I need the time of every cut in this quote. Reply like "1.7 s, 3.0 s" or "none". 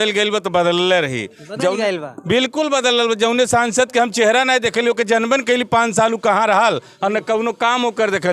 none